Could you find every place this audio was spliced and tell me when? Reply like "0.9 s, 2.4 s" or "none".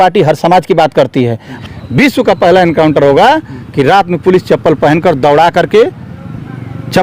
1.7 s